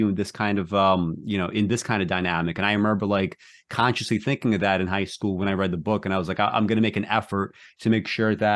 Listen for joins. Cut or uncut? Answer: uncut